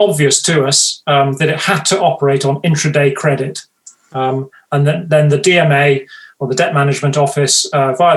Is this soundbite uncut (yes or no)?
yes